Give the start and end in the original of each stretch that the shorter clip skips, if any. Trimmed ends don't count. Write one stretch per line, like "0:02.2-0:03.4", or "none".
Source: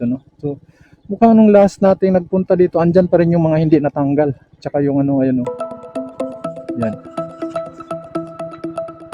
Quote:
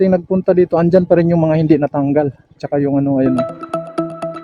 0:05.4-0:07.6